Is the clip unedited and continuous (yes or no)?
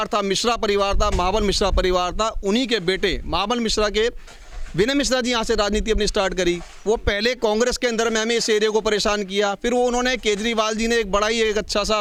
yes